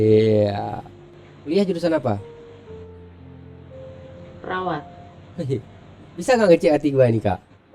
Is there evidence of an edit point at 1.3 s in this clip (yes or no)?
yes